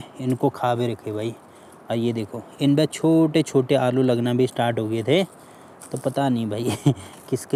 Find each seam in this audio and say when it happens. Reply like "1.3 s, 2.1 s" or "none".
none

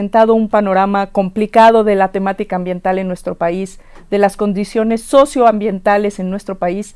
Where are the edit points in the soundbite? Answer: 1.6 s

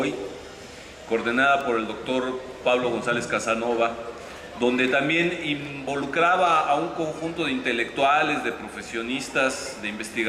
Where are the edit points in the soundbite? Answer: 4.3 s

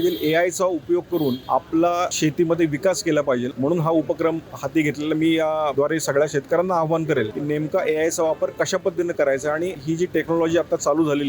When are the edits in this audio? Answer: 1.4 s, 2.1 s, 3.5 s, 5.7 s, 7.3 s, 9.8 s

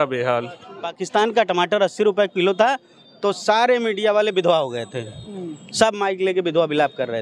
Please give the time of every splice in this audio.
0.9 s

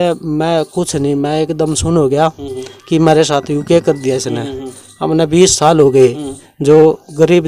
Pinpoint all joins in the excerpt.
none

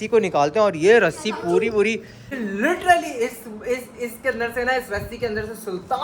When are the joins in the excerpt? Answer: 2.4 s

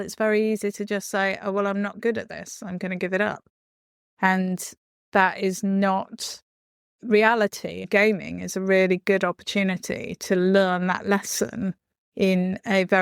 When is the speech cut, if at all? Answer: none

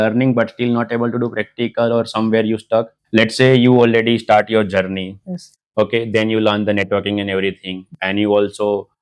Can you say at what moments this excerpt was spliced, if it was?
3.0 s

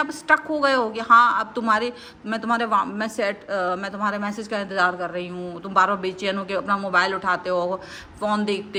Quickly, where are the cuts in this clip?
none

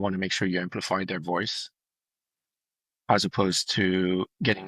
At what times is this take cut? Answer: none

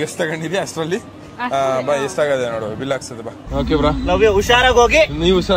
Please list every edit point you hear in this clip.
3.4 s

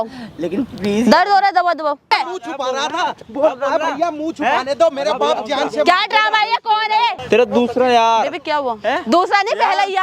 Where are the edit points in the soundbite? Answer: 2.1 s, 7.2 s

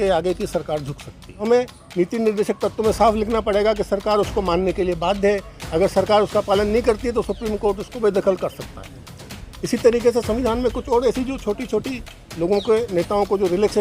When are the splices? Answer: 1.4 s

